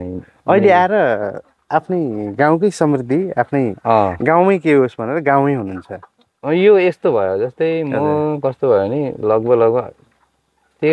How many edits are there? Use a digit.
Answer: 0